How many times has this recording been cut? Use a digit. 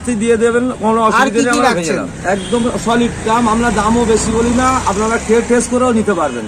1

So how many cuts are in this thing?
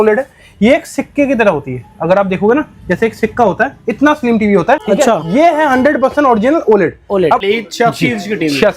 2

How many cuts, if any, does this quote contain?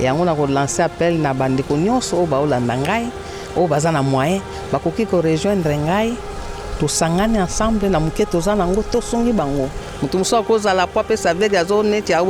0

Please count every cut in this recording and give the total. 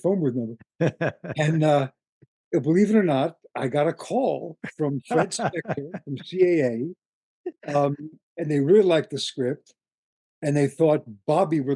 0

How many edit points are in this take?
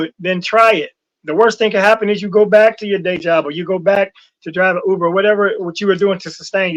0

